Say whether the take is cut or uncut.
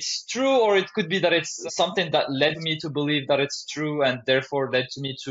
cut